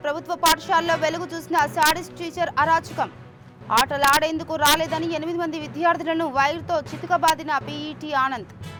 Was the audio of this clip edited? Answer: no; 0 cuts

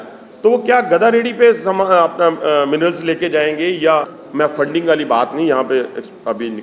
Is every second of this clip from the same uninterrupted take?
no; 1 cut; at 4.2 s

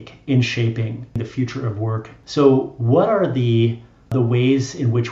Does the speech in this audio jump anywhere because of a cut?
yes; 3 cuts; at 1.2 s, 2.2 s, 4.1 s

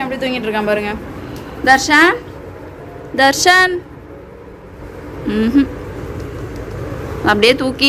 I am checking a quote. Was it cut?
no; 0 cuts

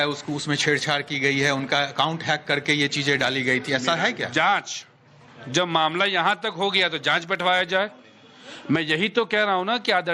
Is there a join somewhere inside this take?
no; 0 cuts

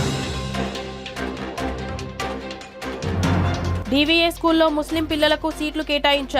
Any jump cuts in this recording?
no; 0 cuts

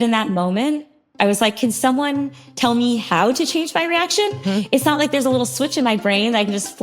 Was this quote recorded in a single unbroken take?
no; 1 cut; at 1.1 s

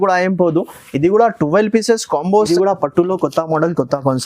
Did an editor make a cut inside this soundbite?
yes; 1 cut; at 2.5 s

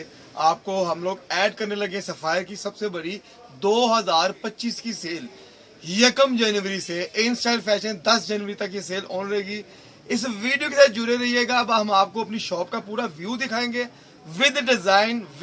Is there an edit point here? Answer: no; 0 cuts

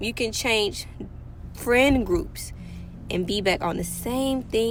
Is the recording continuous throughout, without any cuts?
yes; 0 cuts

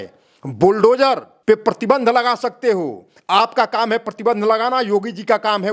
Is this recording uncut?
no; 1 cut; at 1.3 s

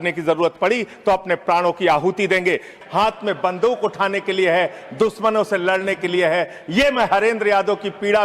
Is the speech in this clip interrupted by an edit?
yes; 1 cut; at 2.8 s

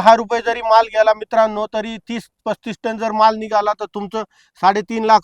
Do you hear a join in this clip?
no; 0 cuts

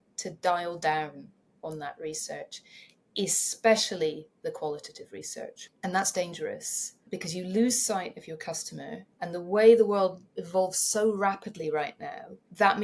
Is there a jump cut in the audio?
no; 0 cuts

